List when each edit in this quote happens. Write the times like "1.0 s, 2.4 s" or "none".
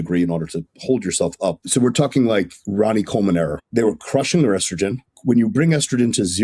1.6 s, 3.6 s, 5.1 s